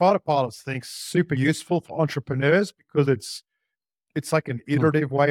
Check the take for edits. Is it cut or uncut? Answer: uncut